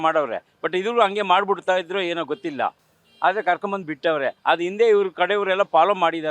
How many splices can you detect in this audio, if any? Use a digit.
0